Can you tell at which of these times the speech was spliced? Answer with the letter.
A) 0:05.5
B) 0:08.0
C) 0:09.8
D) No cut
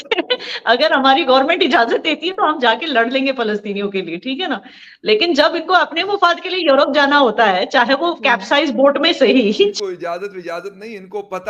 C